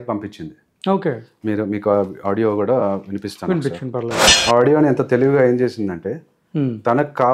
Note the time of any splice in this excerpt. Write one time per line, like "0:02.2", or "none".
0:04.3